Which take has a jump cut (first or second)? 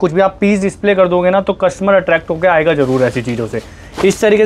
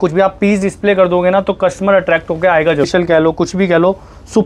second